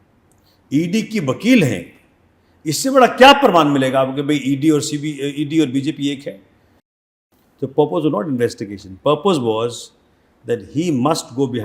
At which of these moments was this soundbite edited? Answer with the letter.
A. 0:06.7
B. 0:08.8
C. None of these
A